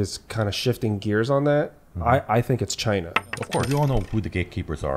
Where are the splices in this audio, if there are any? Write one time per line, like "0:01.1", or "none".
0:03.6